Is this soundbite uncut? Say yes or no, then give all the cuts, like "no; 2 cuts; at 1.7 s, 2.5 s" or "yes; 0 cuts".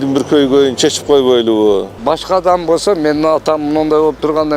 no; 1 cut; at 2.0 s